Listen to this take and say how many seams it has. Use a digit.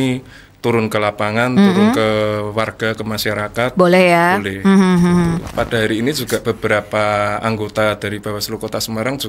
1